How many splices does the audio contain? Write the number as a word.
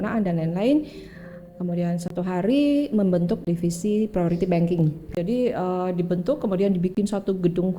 two